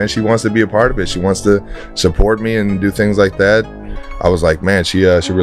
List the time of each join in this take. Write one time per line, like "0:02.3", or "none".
none